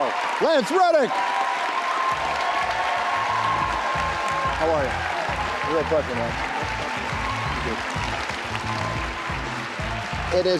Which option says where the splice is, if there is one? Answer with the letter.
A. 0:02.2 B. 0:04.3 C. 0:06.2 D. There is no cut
B